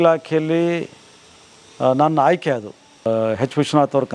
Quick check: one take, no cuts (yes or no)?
no